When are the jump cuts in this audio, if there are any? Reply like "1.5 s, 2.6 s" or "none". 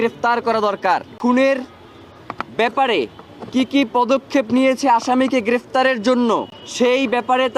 1.1 s, 6.6 s